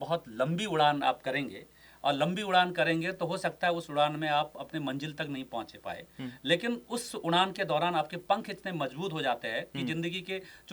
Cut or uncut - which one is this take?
uncut